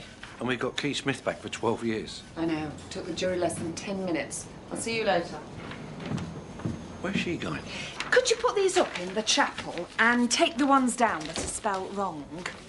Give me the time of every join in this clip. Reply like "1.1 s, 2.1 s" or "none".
none